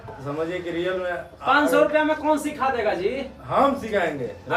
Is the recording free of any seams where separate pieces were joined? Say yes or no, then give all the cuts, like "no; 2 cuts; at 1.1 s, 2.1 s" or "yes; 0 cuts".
yes; 0 cuts